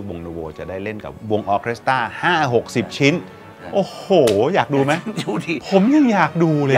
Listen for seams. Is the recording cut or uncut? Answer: uncut